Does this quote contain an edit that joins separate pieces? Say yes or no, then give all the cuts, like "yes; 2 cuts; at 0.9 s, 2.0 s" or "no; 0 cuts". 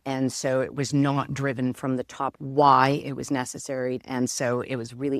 yes; 2 cuts; at 2.4 s, 4.0 s